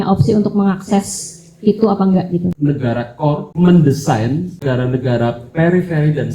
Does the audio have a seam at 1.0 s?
no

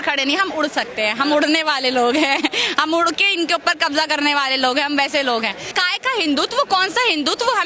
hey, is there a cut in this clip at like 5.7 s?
yes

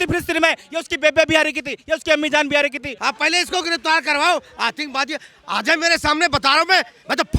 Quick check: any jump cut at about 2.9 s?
yes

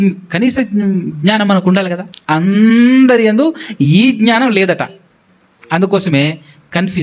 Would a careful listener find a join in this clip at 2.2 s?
yes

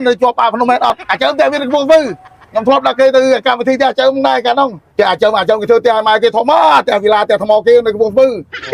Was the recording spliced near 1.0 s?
yes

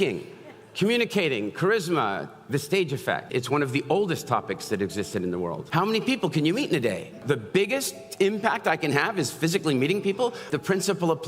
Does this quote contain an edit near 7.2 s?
yes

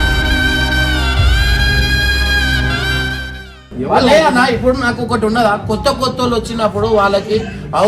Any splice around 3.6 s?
yes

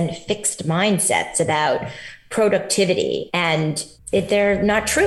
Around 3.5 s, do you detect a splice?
yes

